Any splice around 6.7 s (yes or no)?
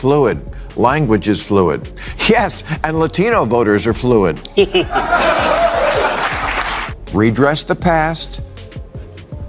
yes